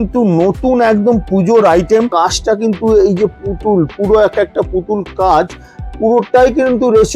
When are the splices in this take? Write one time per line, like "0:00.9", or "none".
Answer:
0:02.1